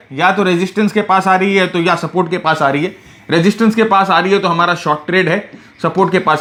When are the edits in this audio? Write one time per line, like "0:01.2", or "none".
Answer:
none